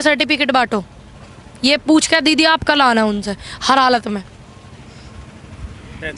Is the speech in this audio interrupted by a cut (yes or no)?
no